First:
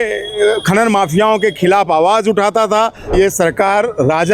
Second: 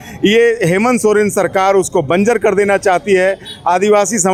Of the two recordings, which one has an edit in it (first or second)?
first